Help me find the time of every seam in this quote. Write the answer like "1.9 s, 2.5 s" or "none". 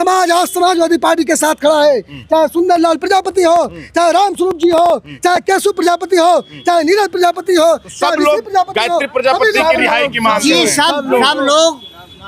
none